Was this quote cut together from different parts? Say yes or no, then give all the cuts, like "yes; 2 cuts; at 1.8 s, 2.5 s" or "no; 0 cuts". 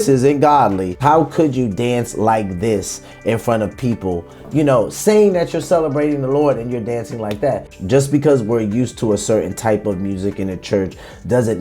yes; 2 cuts; at 1.0 s, 7.7 s